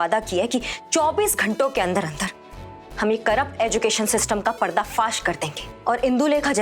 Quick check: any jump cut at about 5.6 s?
yes; 1 cut; at 5.6 s

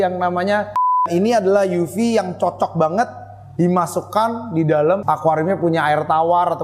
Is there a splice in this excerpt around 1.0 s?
yes; 1 cut; at 1.0 s

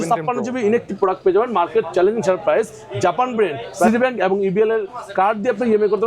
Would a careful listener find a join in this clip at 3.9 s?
yes; 1 cut; at 3.9 s

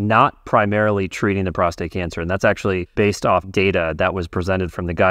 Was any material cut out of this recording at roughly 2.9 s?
yes; 1 cut; at 2.9 s

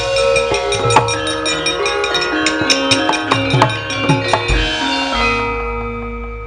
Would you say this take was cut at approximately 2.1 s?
yes; 1 cut; at 2.1 s

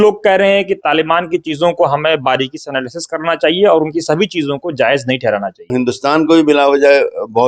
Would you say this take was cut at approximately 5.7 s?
yes; 1 cut; at 5.7 s

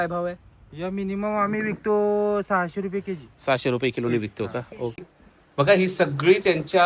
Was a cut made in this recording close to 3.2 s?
no; 1 cut; at 5.0 s

